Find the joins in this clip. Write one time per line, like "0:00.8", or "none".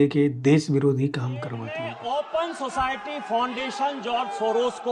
0:01.7